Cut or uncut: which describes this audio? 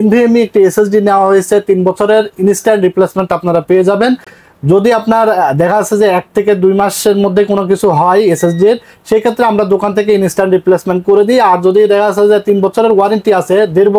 uncut